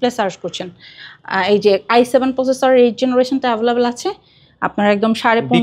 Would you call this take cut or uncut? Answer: uncut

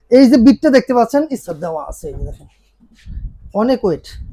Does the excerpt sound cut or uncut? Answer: cut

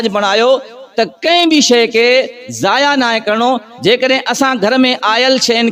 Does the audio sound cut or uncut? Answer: uncut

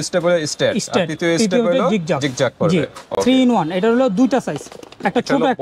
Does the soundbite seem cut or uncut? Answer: uncut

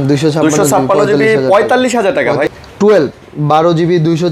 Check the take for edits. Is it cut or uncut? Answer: cut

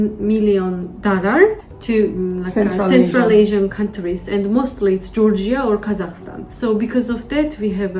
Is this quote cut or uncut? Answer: uncut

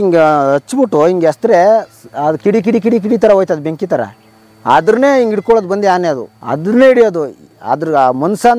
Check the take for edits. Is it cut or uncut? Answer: uncut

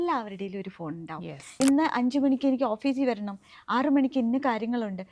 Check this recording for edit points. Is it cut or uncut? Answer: cut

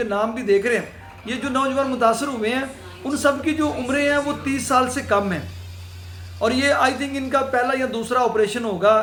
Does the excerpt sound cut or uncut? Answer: uncut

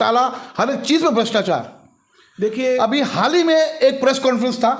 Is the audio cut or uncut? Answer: uncut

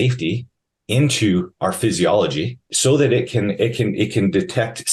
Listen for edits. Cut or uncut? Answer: cut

